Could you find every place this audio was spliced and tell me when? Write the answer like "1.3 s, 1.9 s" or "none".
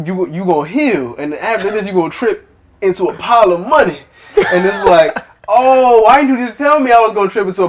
none